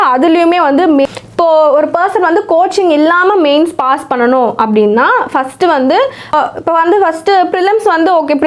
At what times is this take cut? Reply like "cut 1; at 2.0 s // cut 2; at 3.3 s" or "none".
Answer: cut 1; at 1.1 s // cut 2; at 6.2 s